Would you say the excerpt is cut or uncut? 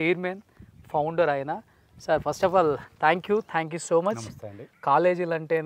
cut